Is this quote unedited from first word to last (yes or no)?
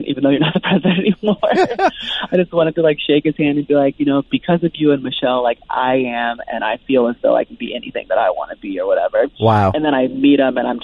yes